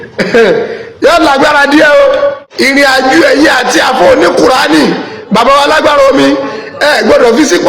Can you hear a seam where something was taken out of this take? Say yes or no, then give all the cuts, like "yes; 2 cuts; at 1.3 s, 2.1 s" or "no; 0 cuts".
yes; 1 cut; at 2.4 s